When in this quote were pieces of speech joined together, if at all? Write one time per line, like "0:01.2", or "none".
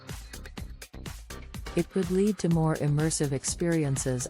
0:01.8